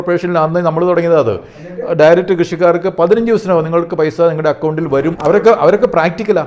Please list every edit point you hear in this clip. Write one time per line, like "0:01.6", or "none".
0:05.2

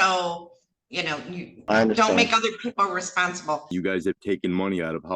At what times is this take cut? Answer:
0:03.7

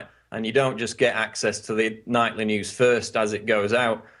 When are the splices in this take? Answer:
0:01.2

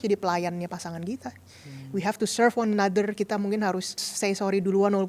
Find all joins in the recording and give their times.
0:04.1

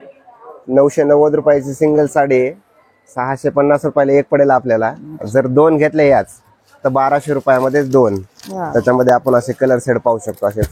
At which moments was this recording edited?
none

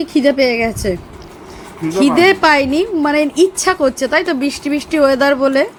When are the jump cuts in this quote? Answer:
none

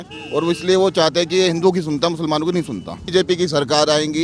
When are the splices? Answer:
0:03.0

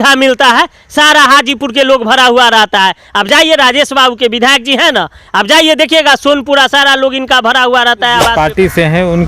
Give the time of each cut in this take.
0:08.3

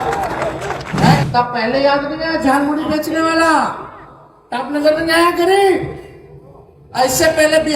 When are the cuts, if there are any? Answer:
0:01.2

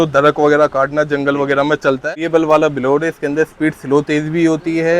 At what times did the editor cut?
0:02.1

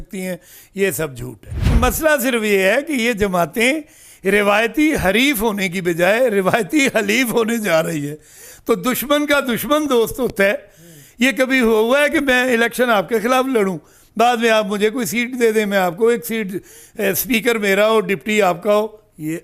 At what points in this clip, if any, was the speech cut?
0:01.7

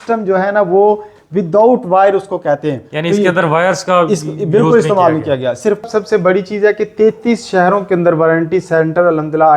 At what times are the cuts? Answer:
0:05.8

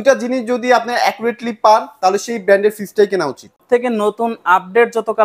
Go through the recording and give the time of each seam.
0:03.6

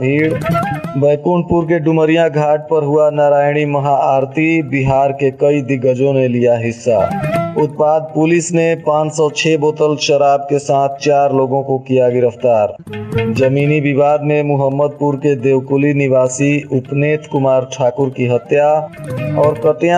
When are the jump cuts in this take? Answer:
none

